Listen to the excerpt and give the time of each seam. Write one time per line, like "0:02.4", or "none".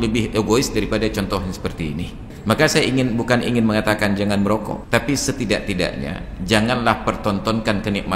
0:02.2
0:04.8